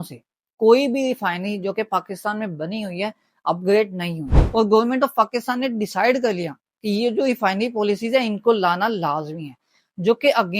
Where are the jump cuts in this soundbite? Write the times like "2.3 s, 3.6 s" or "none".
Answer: 4.4 s